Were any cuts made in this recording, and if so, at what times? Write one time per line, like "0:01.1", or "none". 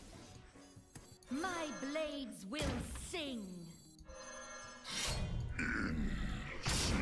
0:01.0
0:03.9
0:06.2